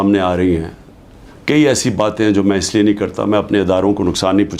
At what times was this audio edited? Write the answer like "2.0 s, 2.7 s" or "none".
none